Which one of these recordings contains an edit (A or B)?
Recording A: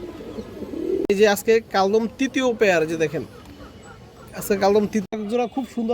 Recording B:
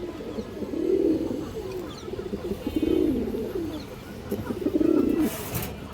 A